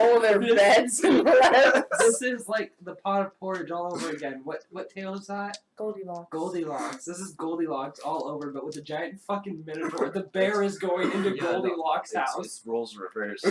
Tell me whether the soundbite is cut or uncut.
uncut